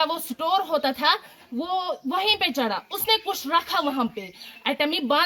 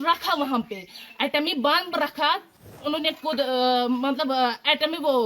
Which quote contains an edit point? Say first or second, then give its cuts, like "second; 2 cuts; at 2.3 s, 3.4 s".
second; 1 cut; at 2.7 s